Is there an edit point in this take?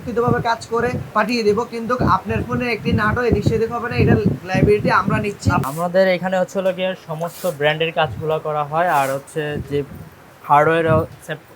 yes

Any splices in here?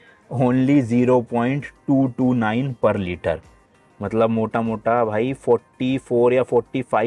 no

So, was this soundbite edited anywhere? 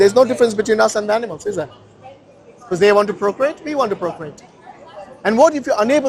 no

